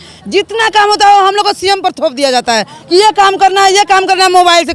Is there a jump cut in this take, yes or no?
no